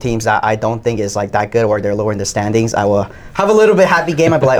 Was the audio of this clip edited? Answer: no; 0 cuts

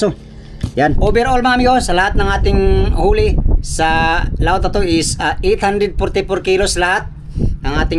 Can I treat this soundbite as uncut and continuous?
no; 1 cut; at 1.0 s

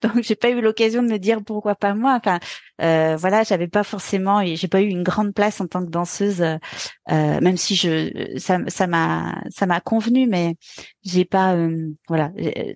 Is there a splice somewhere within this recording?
no; 0 cuts

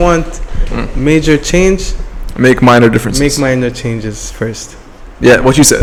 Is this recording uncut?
yes; 0 cuts

